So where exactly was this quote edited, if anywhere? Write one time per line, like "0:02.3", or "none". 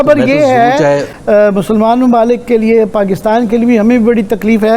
0:01.1